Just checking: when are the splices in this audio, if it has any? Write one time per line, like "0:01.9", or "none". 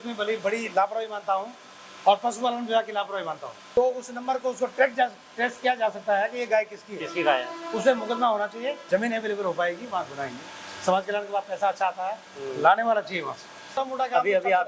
0:03.5
0:08.8
0:13.8

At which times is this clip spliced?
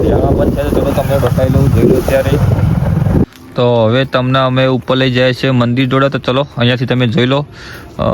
0:03.3

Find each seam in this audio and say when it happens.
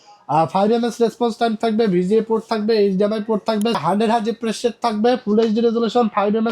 0:03.8

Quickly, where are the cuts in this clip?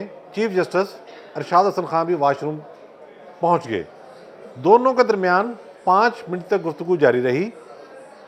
none

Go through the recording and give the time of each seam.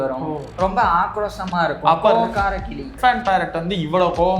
0:02.9

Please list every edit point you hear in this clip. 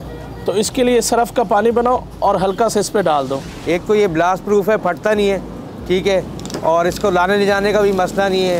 0:03.5

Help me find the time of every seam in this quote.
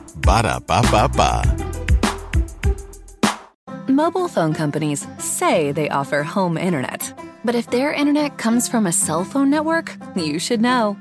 0:03.7

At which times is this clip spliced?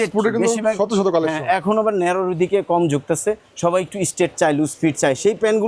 none

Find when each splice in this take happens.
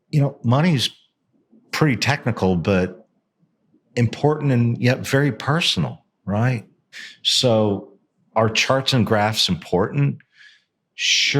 0:06.9

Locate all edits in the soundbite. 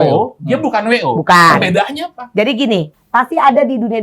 0:02.9

